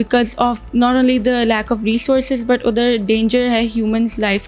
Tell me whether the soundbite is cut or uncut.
uncut